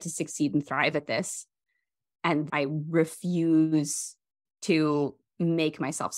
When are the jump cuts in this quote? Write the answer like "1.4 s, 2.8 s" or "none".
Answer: 2.5 s